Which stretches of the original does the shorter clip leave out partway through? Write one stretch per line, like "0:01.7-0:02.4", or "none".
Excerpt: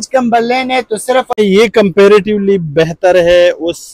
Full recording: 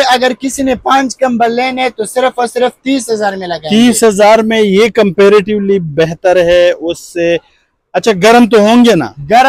0:02.4-0:04.5